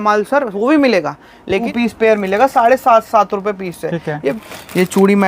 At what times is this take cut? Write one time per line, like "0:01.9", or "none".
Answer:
0:01.7
0:04.4